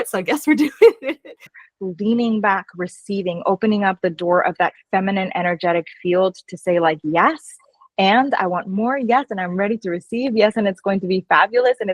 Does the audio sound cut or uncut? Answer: cut